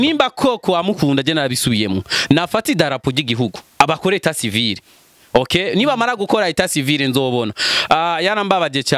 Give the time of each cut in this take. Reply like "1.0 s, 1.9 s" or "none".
none